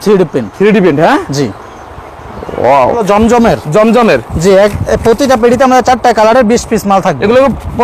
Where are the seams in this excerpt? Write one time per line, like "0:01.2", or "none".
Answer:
0:03.0